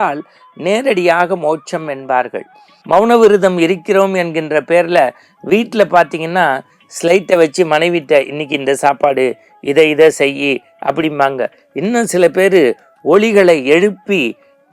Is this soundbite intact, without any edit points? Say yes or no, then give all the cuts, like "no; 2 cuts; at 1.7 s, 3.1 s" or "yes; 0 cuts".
no; 1 cut; at 2.7 s